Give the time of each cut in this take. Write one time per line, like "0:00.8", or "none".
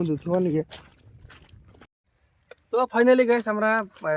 0:02.1